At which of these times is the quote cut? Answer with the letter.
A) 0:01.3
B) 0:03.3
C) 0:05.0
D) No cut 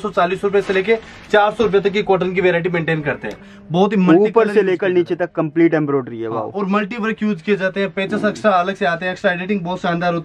B